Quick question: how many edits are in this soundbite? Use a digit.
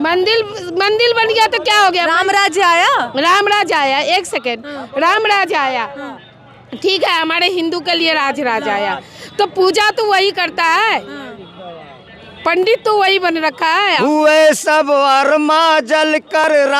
1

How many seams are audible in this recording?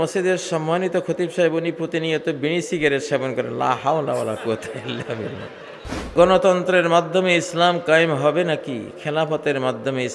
1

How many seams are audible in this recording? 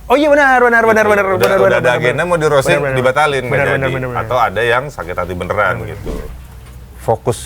1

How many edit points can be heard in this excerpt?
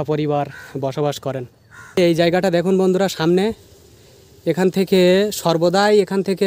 1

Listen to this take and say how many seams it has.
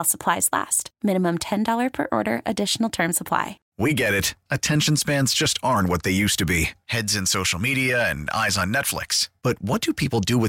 1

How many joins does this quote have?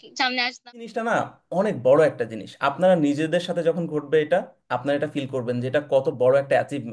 1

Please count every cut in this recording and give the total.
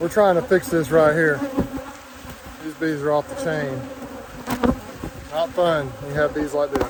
0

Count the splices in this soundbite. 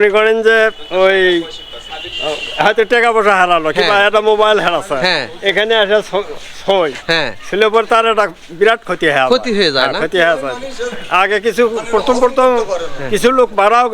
0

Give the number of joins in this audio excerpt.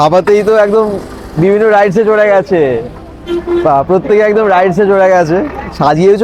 0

